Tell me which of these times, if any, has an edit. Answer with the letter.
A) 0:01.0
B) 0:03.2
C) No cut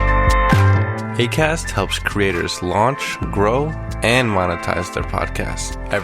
A